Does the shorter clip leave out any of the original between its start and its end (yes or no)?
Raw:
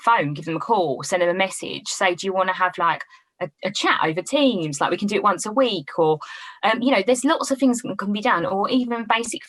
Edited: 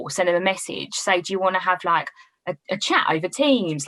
no